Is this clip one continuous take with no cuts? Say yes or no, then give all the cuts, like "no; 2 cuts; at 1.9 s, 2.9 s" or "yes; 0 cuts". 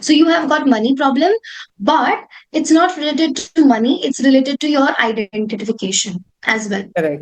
yes; 0 cuts